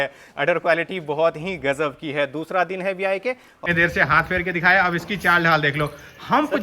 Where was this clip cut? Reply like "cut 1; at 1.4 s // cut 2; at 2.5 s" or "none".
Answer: cut 1; at 3.6 s